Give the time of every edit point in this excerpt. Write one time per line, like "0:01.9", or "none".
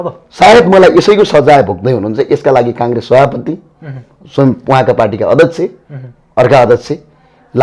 none